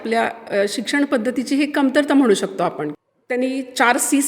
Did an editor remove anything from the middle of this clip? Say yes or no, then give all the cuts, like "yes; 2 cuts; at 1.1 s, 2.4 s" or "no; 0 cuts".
yes; 1 cut; at 2.9 s